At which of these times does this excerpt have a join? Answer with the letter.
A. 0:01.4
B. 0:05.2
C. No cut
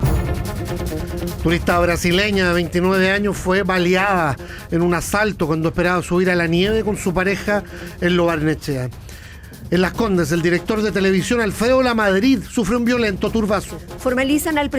A